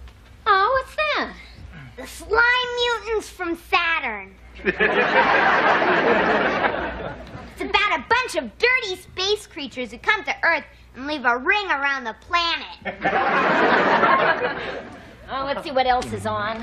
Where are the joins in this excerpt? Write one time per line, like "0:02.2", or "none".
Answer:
none